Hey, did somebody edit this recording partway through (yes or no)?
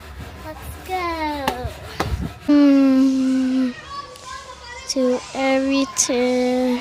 yes